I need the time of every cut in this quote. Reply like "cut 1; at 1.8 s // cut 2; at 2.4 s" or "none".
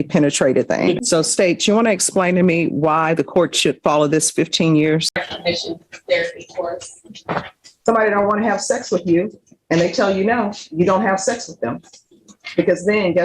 cut 1; at 1.0 s // cut 2; at 5.2 s